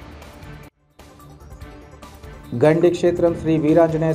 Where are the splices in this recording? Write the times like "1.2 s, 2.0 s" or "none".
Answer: 1.8 s